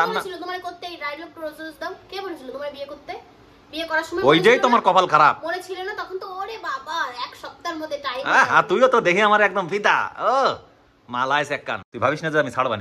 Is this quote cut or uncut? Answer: cut